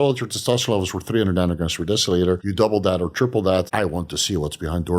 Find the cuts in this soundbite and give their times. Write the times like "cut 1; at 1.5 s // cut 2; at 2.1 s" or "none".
cut 1; at 2.5 s // cut 2; at 3.7 s